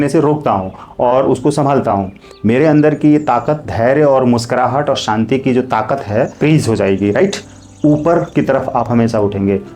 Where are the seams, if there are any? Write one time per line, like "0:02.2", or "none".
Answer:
0:06.4